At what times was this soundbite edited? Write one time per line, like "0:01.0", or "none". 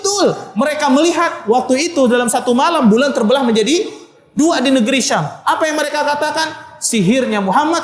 none